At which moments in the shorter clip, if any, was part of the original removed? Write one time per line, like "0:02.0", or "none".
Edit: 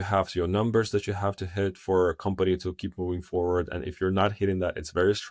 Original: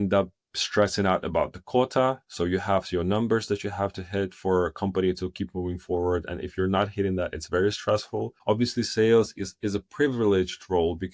none